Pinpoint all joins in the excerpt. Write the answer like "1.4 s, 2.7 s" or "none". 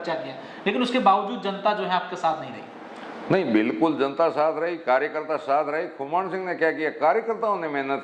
none